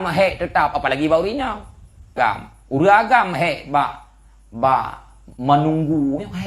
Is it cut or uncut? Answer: cut